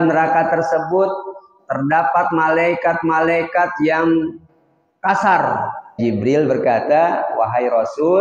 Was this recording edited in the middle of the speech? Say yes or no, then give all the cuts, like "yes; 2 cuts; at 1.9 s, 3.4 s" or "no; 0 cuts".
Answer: yes; 1 cut; at 6.0 s